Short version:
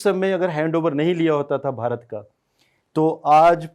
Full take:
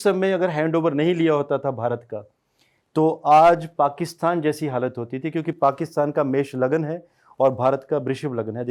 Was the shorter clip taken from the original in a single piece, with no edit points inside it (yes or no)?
yes